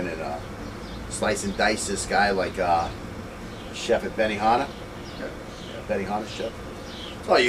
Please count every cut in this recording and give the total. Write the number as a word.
one